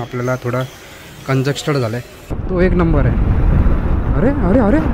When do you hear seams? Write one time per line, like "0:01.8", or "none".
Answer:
0:02.4